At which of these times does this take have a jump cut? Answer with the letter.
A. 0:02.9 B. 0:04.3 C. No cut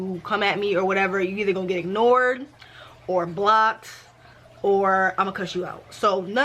C